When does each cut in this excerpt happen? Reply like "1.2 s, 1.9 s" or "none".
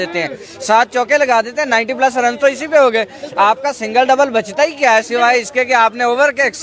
none